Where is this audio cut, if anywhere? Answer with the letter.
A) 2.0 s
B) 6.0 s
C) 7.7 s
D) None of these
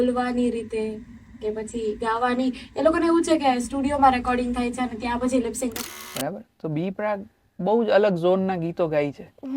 B